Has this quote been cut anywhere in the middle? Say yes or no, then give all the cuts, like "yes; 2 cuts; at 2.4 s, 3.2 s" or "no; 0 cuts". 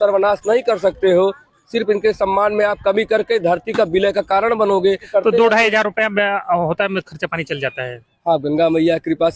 yes; 1 cut; at 5.1 s